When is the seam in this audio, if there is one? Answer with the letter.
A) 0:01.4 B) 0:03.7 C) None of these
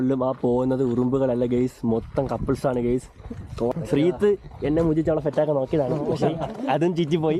B